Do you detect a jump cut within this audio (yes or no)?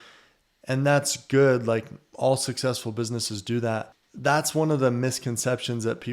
yes